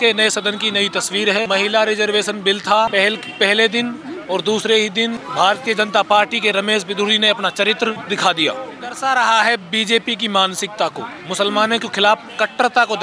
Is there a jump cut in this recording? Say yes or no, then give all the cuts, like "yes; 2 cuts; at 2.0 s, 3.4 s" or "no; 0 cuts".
yes; 5 cuts; at 1.5 s, 2.9 s, 5.2 s, 8.0 s, 9.0 s